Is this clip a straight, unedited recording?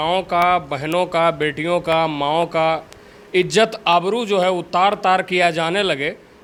yes; 0 cuts

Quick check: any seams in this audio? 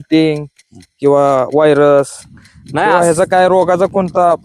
no; 0 cuts

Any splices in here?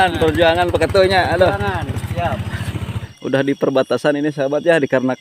yes; 1 cut; at 3.0 s

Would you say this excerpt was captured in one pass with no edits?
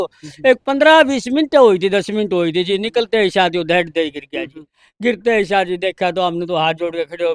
yes; 0 cuts

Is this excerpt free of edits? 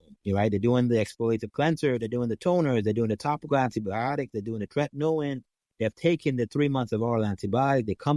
yes; 0 cuts

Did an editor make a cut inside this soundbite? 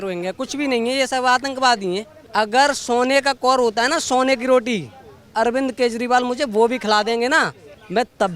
yes; 1 cut; at 2.2 s

